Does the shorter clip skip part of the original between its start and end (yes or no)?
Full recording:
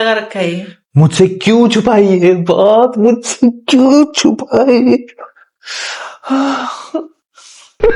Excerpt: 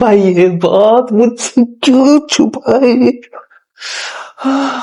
no